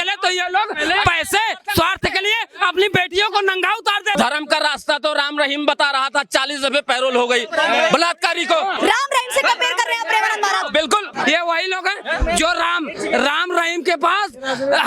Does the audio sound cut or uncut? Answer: cut